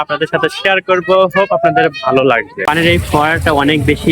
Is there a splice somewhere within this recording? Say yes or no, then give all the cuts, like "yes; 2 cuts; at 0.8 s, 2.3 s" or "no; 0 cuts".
yes; 1 cut; at 2.6 s